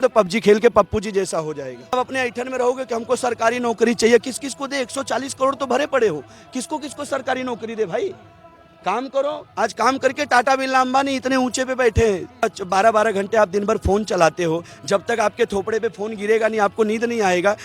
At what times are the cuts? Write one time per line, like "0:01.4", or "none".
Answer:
0:01.9
0:12.4